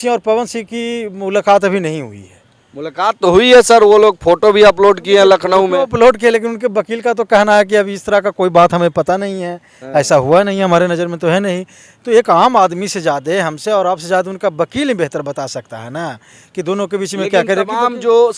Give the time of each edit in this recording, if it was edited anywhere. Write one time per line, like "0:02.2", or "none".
none